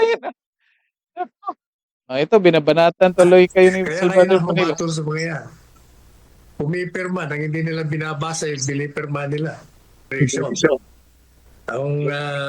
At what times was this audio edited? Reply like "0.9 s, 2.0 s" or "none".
10.1 s